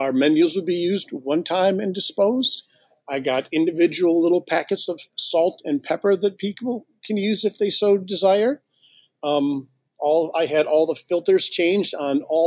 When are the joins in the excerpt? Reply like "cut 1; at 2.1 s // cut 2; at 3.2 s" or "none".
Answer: none